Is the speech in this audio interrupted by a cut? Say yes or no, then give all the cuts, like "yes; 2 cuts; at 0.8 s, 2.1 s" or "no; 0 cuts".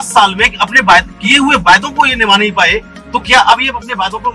no; 0 cuts